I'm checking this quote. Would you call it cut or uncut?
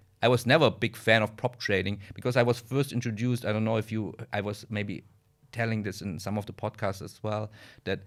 uncut